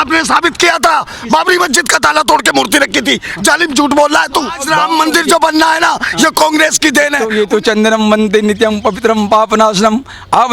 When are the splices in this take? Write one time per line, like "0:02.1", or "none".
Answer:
0:04.6
0:07.2